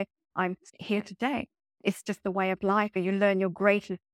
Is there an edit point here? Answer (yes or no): yes